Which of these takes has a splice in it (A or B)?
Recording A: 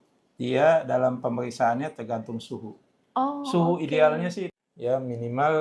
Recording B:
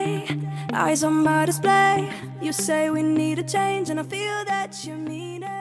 A